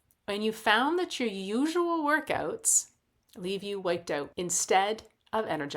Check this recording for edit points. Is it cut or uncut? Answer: cut